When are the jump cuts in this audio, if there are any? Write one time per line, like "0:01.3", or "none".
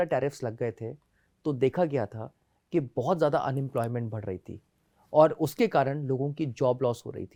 none